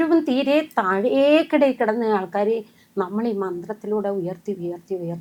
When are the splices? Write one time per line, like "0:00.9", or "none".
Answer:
none